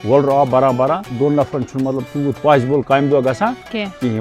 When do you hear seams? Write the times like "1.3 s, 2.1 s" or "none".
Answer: 1.1 s